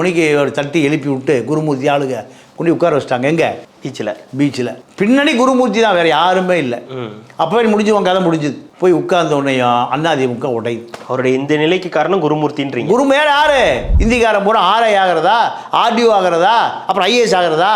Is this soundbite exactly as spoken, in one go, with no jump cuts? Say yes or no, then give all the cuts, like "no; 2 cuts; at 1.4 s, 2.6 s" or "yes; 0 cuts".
no; 1 cut; at 13.9 s